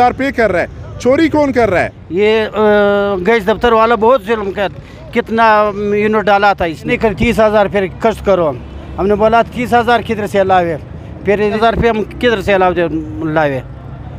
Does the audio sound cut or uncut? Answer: cut